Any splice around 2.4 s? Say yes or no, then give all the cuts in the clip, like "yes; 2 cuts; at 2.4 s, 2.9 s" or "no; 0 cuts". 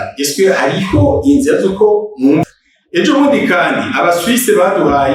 yes; 1 cut; at 2.4 s